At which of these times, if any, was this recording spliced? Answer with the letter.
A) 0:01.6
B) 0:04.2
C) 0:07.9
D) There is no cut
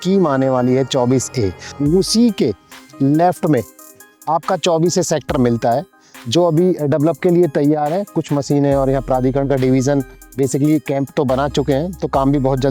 A